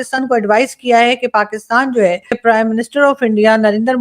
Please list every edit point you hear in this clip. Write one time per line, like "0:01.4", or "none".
0:02.4